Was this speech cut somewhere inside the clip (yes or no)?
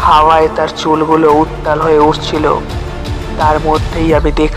yes